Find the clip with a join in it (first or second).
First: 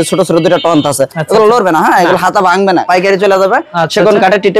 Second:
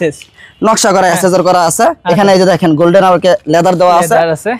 first